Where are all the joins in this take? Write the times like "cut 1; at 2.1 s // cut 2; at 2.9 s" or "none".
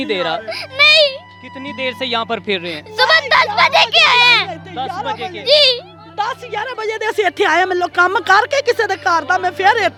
none